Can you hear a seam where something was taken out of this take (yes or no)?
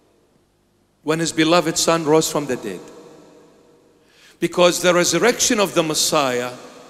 no